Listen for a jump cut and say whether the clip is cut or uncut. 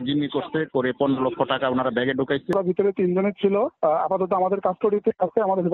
cut